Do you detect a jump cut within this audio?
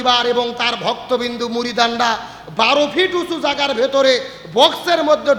no; 0 cuts

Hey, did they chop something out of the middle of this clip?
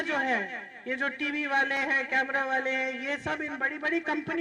no; 0 cuts

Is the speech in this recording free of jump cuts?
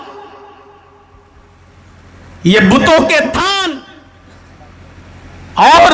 no; 1 cut; at 3.7 s

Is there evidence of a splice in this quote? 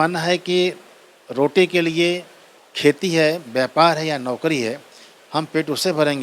no; 0 cuts

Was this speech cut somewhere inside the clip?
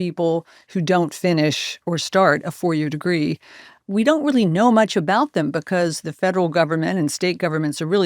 yes; 2 cuts; at 1.7 s, 3.8 s

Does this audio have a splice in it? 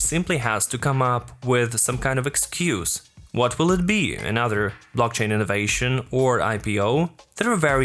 no; 0 cuts

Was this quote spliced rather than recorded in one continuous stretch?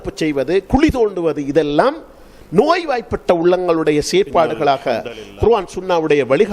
no; 0 cuts

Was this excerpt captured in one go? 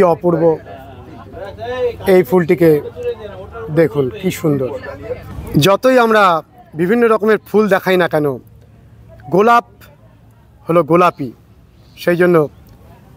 no; 1 cut; at 5.3 s

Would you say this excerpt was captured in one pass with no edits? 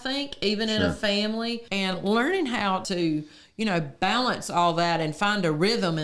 no; 2 cuts; at 1.6 s, 2.9 s

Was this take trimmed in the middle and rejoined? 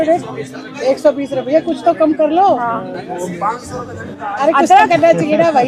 no; 0 cuts

